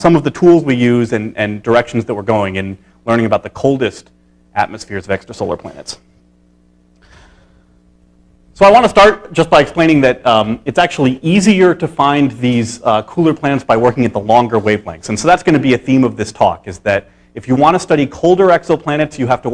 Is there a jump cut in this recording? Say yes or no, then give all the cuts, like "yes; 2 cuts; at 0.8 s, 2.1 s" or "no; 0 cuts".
no; 0 cuts